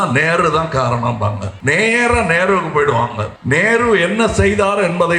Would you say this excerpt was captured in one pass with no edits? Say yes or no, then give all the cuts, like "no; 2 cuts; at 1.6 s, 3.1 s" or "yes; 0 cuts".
no; 2 cuts; at 1.5 s, 3.3 s